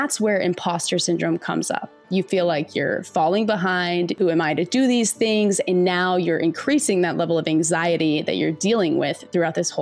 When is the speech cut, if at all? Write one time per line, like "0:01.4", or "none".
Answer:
0:04.1